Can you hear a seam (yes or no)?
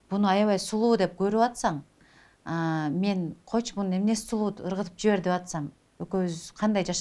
no